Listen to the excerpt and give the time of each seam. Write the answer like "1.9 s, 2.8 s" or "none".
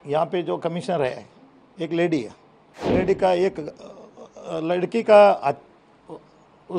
2.9 s